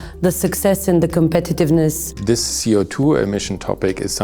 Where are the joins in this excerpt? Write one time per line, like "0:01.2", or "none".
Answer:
0:02.1